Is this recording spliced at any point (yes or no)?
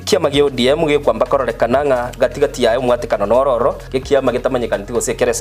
yes